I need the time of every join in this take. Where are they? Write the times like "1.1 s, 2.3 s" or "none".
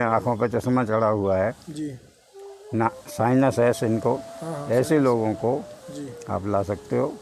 none